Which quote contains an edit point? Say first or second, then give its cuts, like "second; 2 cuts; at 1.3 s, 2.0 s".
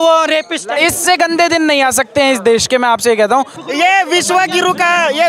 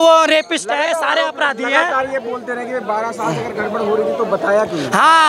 first; 2 cuts; at 0.8 s, 3.6 s